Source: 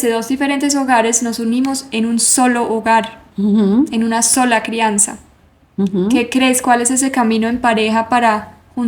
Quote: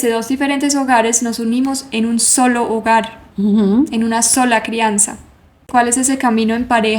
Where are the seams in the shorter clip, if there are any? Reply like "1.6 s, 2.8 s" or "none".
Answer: 5.7 s